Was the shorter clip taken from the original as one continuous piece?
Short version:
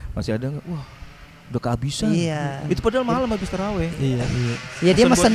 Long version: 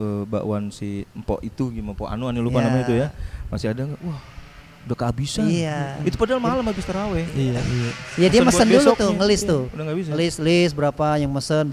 yes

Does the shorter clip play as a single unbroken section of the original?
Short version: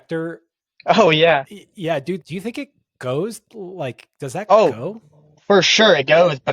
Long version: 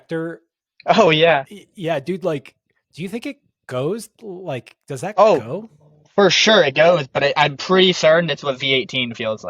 no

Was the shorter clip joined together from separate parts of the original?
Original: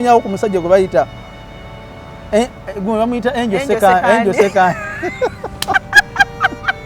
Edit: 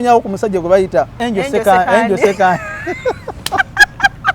yes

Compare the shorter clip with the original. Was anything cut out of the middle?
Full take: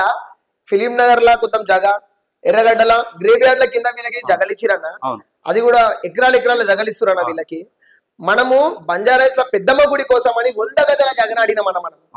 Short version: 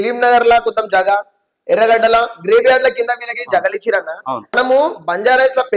yes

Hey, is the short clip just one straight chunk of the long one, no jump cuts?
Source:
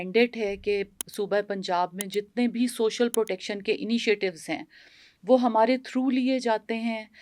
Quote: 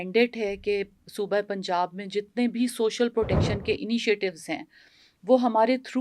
yes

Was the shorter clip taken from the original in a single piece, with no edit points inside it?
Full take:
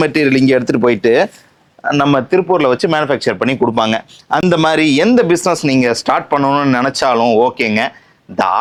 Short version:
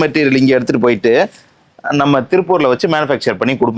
yes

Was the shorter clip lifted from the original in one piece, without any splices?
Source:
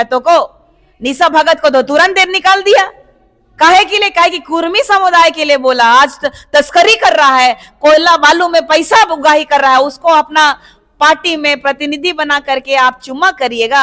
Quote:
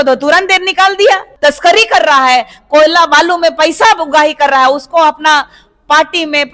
no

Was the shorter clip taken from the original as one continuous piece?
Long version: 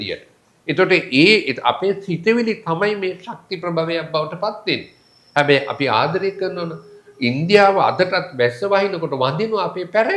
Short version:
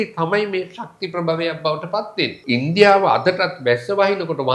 no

